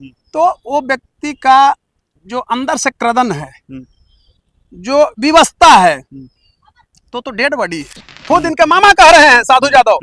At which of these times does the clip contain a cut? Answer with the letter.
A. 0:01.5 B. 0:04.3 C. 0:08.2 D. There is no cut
C